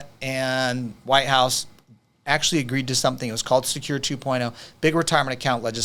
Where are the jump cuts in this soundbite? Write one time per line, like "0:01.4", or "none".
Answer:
none